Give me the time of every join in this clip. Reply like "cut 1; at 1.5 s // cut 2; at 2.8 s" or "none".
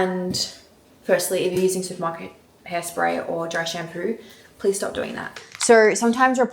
cut 1; at 5.5 s